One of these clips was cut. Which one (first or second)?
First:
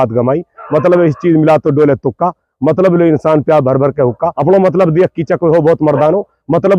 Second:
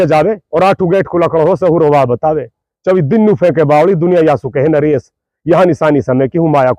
first